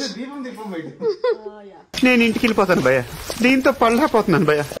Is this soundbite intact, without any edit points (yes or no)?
no